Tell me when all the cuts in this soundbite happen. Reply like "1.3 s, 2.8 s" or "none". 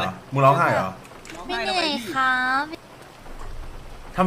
2.7 s

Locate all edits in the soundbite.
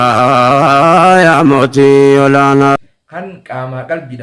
none

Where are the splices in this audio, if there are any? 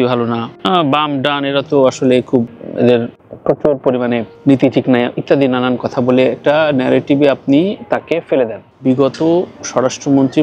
8.7 s

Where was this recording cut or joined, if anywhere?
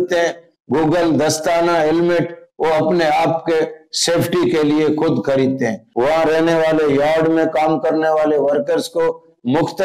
5.8 s

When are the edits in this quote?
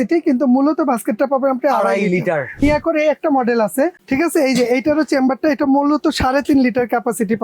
2.6 s, 4.0 s

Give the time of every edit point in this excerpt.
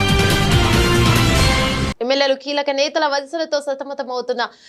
1.9 s

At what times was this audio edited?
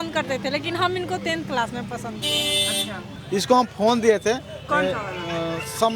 3.1 s

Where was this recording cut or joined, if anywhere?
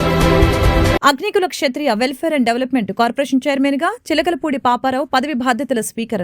1.0 s

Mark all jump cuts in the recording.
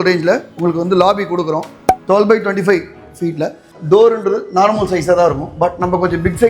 3.7 s

